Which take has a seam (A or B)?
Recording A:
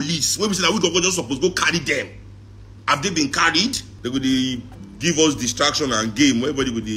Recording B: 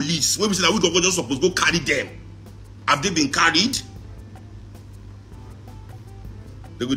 A